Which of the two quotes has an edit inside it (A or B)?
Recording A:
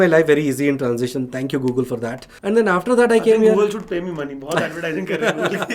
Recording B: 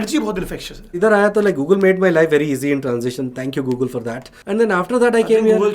B